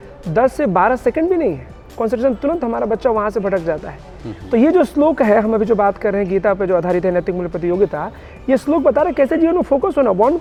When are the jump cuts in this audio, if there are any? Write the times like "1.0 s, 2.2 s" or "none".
none